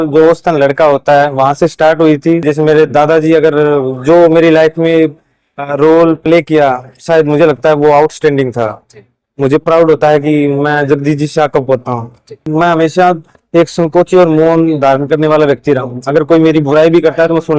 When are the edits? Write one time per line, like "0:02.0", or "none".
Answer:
0:02.5
0:12.5